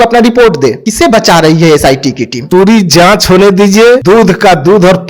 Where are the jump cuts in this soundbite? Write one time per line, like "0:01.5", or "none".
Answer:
0:00.8
0:02.3
0:04.0